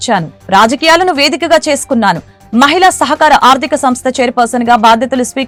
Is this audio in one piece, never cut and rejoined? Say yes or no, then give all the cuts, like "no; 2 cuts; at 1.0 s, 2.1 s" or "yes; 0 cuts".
yes; 0 cuts